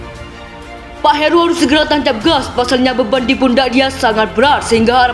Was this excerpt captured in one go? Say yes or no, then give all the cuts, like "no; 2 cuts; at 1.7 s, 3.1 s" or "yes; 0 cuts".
no; 1 cut; at 1.0 s